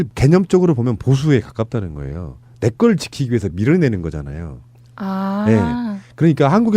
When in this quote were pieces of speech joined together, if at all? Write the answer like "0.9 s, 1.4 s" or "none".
none